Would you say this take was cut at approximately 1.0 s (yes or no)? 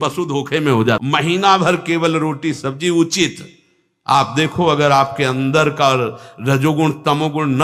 yes